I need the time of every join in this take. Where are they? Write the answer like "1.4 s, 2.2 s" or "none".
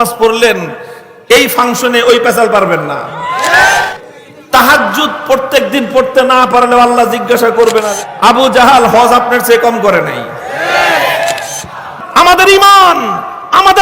3.8 s, 7.9 s, 11.8 s